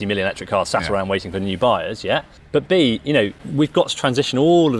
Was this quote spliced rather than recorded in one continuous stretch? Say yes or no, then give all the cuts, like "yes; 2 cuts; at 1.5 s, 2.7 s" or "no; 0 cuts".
yes; 2 cuts; at 2.4 s, 3.4 s